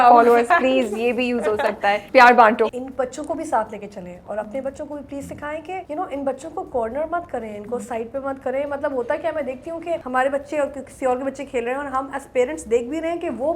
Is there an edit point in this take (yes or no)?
yes